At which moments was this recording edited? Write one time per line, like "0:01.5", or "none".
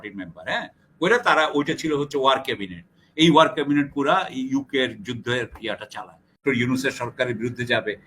0:06.4